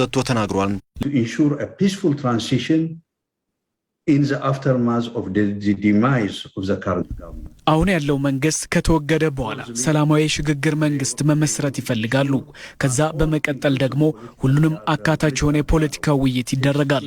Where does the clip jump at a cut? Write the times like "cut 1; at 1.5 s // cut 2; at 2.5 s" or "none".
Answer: cut 1; at 1.0 s